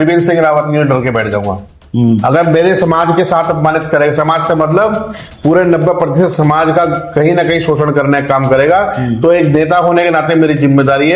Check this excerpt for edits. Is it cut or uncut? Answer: uncut